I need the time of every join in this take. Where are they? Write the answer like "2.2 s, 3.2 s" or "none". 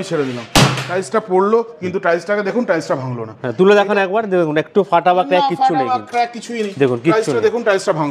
none